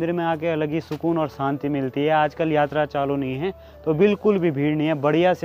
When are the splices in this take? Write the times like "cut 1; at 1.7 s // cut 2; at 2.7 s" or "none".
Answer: none